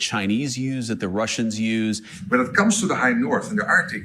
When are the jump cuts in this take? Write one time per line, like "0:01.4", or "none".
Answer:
0:02.1